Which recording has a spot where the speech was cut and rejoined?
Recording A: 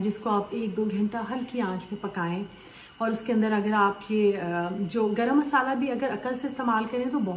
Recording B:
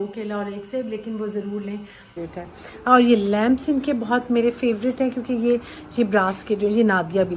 B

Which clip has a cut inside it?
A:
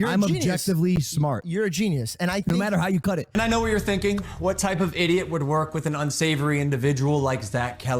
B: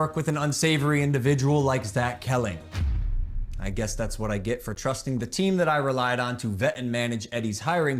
A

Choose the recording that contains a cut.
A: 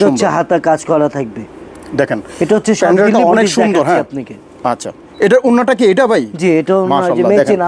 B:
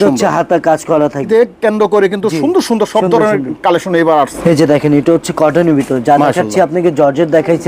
B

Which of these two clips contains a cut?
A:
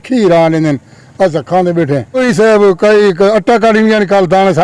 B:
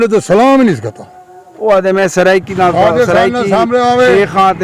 A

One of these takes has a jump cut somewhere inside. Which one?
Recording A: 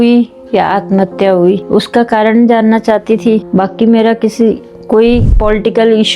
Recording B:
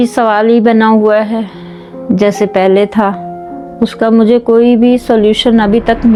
A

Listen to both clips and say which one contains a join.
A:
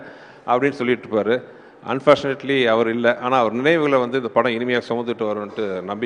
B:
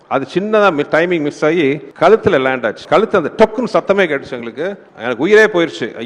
B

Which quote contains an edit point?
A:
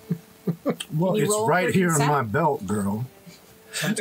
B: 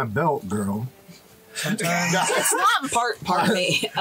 B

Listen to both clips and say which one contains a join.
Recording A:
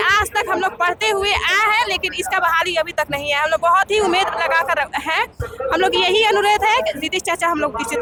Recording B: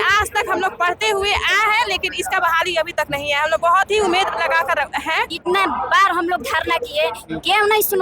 B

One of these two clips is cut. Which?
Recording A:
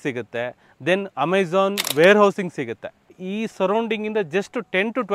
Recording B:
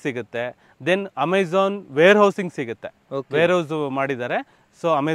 A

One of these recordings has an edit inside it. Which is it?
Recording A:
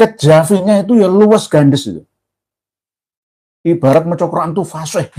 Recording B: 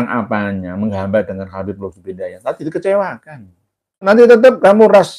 B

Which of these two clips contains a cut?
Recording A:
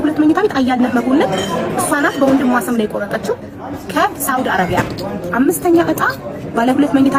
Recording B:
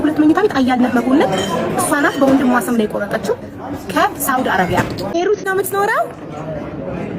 B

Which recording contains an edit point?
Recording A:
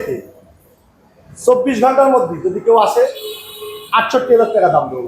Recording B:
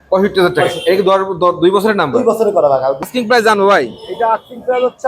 B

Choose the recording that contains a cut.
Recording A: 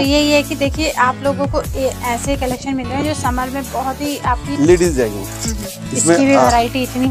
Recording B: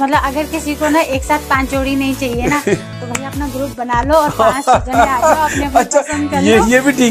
A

